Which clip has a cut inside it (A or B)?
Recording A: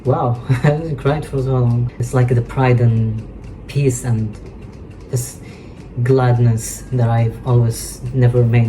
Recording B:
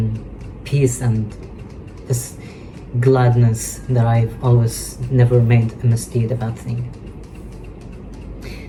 A